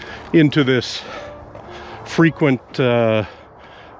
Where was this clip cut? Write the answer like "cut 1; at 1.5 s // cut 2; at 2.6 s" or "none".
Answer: none